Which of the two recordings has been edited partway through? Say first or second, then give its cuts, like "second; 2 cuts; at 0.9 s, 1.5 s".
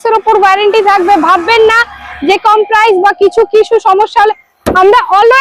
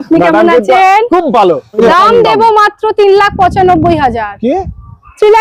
second; 1 cut; at 1.7 s